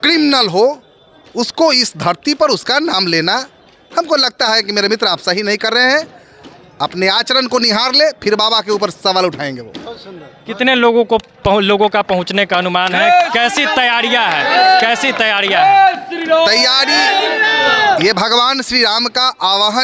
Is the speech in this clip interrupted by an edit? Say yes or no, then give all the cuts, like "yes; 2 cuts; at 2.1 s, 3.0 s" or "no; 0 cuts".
no; 0 cuts